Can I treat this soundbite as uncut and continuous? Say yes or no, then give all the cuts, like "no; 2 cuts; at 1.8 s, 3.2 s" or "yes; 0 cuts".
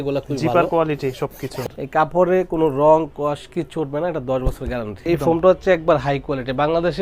no; 2 cuts; at 1.5 s, 5.1 s